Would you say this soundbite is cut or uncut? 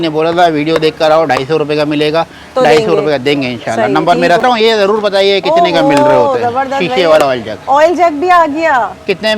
cut